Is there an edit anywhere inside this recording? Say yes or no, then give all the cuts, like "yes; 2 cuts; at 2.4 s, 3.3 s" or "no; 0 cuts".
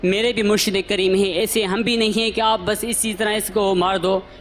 no; 0 cuts